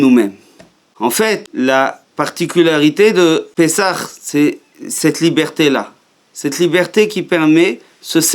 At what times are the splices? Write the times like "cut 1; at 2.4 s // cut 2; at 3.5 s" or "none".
cut 1; at 1.0 s // cut 2; at 3.5 s